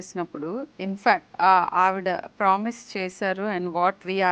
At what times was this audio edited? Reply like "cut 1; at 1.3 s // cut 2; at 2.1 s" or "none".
cut 1; at 1.3 s